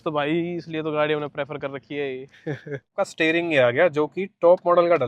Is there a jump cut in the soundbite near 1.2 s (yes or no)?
no